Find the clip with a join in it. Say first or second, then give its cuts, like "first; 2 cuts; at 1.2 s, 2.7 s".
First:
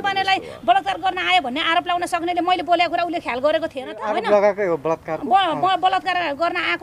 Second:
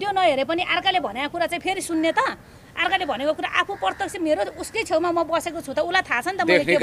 first; 1 cut; at 4.0 s